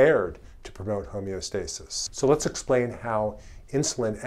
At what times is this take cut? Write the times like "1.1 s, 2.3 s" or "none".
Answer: 1.8 s